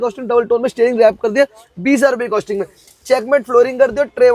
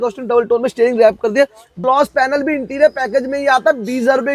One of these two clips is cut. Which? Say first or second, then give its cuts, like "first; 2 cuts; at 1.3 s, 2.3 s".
second; 1 cut; at 1.8 s